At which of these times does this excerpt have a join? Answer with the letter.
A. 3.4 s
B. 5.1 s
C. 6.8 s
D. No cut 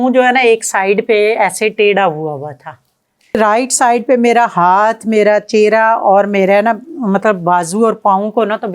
A